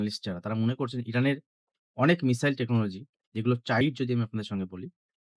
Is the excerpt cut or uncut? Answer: cut